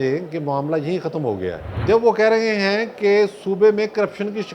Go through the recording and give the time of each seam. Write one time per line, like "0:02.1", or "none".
0:01.7